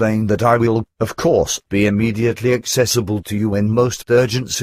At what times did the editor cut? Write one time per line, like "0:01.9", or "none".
0:03.1